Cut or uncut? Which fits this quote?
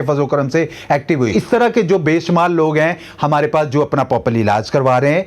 cut